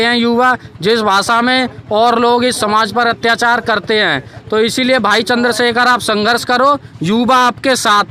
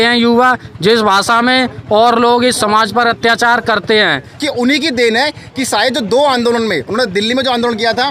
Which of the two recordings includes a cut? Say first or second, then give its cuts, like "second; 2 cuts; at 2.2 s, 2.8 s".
second; 1 cut; at 4.3 s